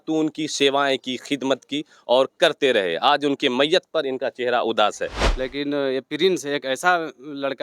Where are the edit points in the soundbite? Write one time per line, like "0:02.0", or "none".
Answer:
0:05.2